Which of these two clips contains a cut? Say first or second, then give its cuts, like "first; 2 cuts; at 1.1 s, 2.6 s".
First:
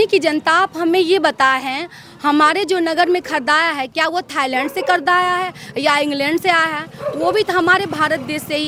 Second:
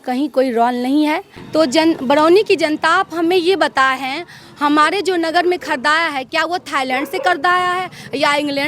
second; 1 cut; at 1.3 s